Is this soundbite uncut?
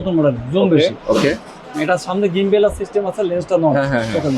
yes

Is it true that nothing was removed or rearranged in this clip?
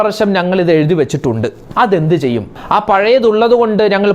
no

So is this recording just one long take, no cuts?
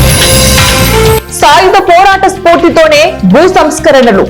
no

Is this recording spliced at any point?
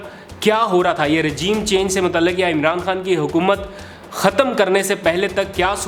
no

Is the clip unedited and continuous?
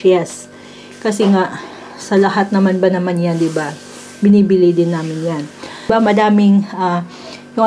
no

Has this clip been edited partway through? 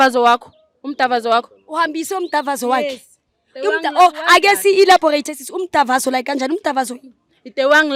no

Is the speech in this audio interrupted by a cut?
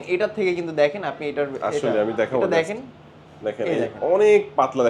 no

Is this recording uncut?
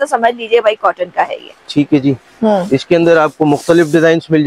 yes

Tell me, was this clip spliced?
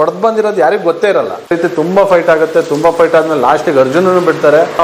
yes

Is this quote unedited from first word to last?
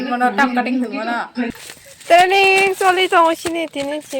no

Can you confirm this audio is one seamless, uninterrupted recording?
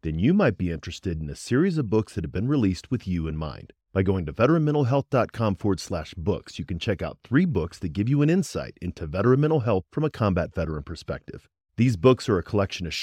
yes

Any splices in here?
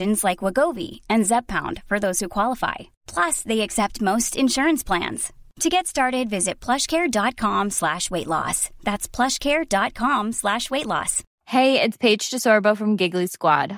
yes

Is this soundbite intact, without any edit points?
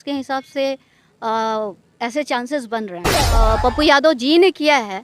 no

